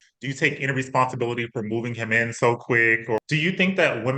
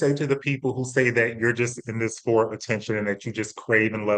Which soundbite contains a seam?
first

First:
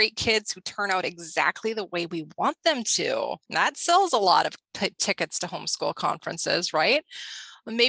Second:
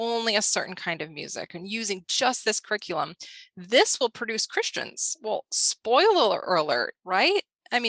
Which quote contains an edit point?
first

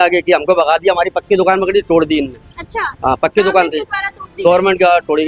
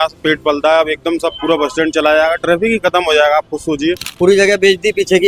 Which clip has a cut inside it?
second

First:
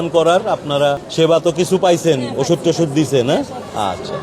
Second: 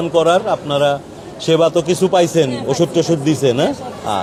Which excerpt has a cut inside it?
first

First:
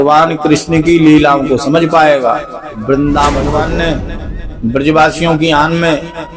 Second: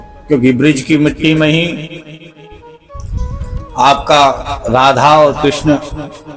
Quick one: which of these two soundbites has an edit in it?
first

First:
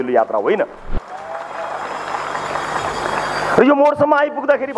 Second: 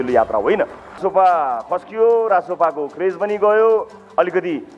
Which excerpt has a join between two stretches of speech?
second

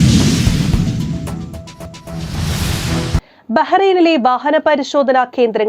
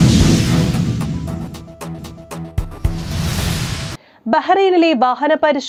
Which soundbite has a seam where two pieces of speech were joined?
first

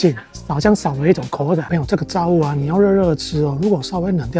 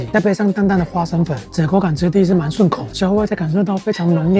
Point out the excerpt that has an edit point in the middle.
first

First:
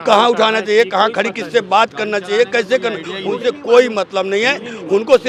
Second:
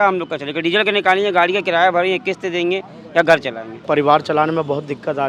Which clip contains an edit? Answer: second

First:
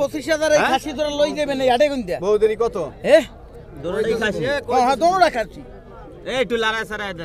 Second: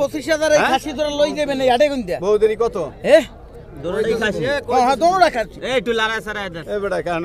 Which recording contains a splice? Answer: second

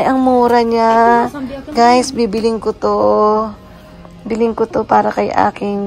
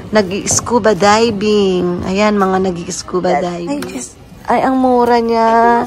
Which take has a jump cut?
second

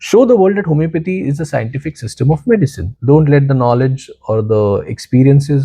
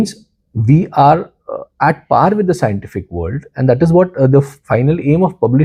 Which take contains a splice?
first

